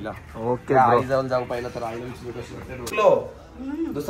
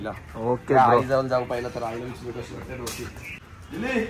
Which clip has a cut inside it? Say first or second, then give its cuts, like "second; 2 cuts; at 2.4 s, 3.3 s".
first; 1 cut; at 2.9 s